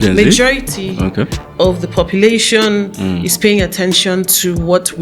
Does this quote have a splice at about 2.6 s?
no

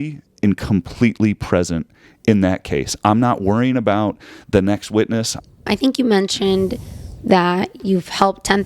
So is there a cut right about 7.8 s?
yes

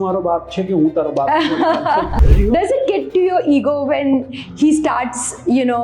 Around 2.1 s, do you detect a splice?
yes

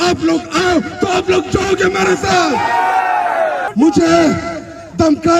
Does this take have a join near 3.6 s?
yes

